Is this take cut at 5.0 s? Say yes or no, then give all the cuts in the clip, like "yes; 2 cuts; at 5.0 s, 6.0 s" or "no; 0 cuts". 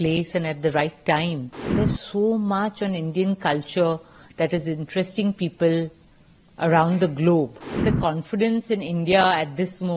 no; 2 cuts; at 1.6 s, 7.8 s